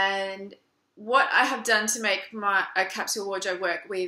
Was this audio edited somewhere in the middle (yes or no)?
yes